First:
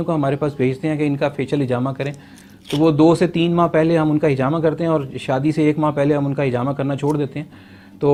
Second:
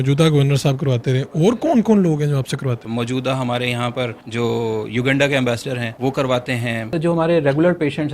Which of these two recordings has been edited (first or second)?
second